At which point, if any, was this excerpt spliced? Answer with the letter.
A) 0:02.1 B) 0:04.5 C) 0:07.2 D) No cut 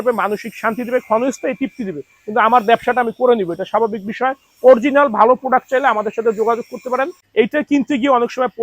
C